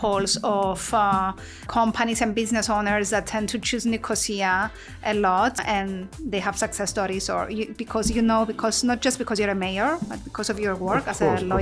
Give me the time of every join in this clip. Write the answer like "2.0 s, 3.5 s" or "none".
none

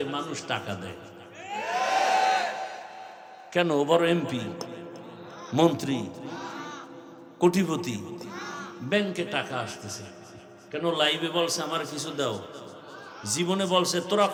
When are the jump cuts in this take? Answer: none

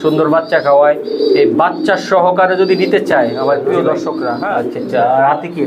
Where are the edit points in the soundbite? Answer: 4.4 s

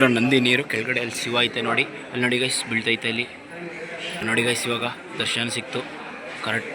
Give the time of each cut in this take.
4.2 s

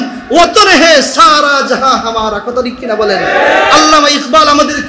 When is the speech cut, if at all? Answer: none

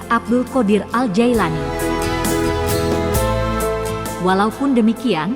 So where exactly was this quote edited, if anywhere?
none

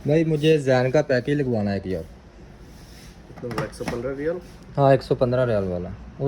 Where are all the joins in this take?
none

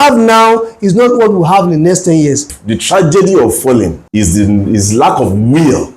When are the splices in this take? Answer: 2.5 s, 4.0 s

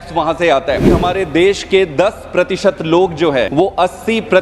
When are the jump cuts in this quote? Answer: 0.9 s, 3.5 s

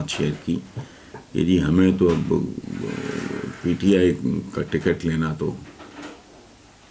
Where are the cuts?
none

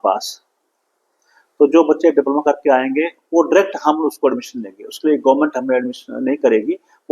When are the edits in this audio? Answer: none

